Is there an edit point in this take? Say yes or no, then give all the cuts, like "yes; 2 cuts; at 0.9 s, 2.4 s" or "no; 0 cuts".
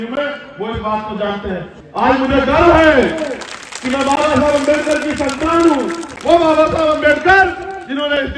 yes; 1 cut; at 1.7 s